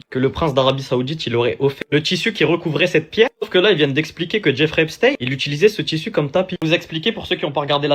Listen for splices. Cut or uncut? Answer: cut